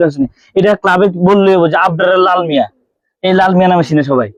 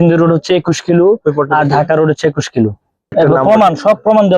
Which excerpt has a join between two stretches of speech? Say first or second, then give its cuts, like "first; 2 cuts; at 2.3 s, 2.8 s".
second; 1 cut; at 3.1 s